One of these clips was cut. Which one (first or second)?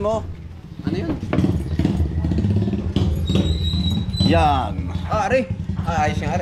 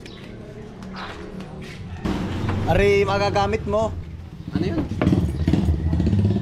second